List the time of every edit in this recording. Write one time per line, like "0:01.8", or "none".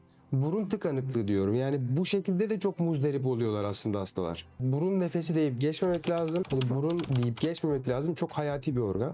0:04.6
0:06.8